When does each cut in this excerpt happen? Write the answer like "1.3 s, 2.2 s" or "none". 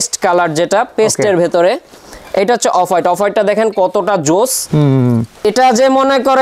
5.4 s